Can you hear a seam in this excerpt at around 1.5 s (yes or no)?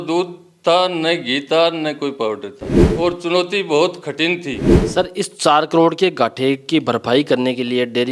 no